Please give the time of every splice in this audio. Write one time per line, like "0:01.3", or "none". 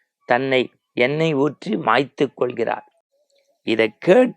none

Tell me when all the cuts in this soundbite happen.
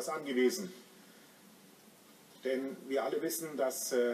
0:02.4

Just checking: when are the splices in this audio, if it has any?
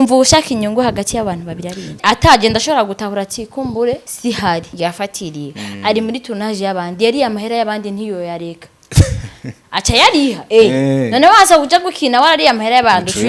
0:02.0
0:04.1
0:04.7

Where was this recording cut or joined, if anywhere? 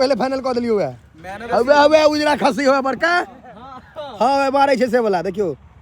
none

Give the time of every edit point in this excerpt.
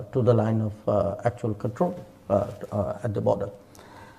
none

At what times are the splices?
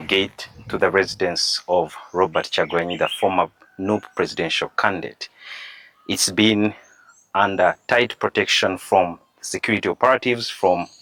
none

